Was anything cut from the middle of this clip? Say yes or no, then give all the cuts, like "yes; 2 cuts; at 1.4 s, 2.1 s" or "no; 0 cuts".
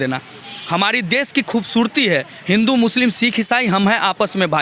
no; 0 cuts